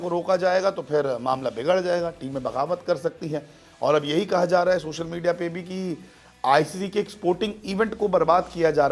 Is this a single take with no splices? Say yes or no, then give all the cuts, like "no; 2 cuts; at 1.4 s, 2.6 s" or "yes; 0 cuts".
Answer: yes; 0 cuts